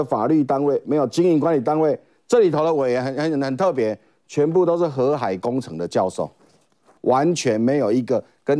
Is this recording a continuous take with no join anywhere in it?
no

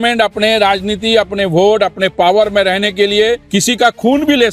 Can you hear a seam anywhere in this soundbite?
yes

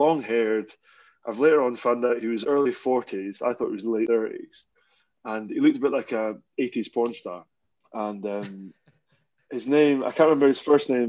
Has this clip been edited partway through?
yes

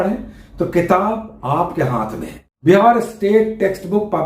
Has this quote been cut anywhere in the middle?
yes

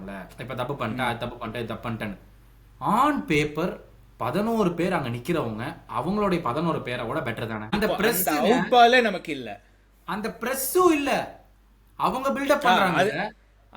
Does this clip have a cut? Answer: yes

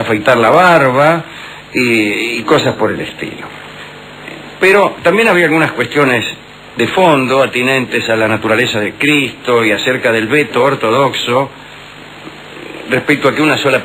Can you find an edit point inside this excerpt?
yes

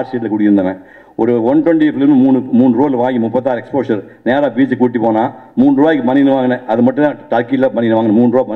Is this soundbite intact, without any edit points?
yes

